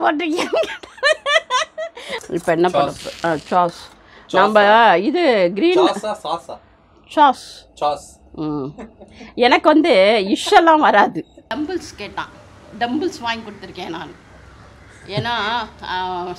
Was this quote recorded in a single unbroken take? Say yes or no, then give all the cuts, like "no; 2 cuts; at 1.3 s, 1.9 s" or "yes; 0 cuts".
no; 2 cuts; at 2.2 s, 11.4 s